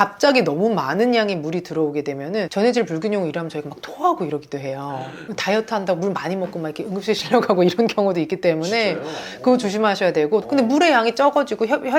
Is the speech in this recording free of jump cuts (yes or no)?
no